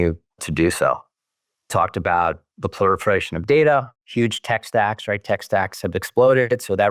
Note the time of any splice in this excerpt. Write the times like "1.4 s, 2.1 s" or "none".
none